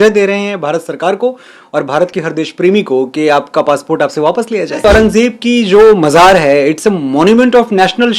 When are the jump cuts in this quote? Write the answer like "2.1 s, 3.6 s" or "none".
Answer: 4.8 s